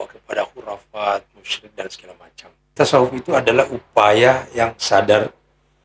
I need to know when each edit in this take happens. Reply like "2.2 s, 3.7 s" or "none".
2.7 s